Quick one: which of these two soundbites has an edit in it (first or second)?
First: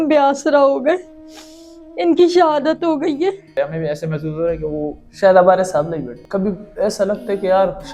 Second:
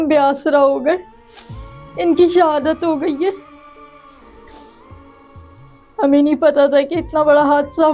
first